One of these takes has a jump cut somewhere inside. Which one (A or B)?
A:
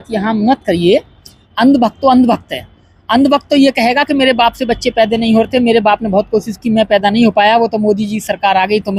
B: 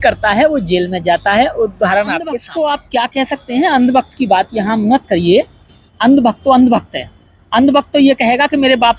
B